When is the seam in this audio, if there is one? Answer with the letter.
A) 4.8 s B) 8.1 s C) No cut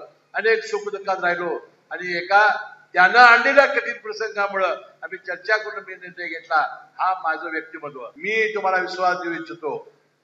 B